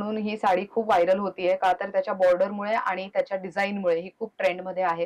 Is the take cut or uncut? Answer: uncut